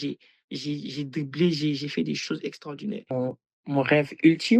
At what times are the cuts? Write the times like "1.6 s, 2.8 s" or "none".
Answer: 3.1 s